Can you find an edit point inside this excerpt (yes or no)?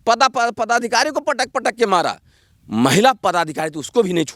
no